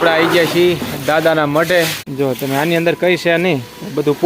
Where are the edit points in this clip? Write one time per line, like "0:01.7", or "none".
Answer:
0:02.0